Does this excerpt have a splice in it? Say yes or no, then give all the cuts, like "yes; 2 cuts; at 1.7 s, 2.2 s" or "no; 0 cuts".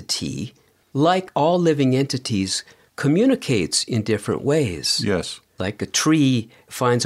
no; 0 cuts